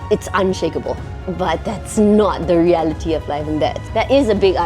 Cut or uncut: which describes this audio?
cut